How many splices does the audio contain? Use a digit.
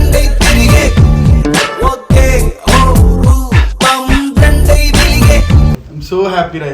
1